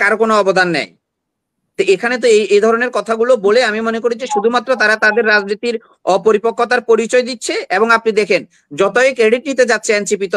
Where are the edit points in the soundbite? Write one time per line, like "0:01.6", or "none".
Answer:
none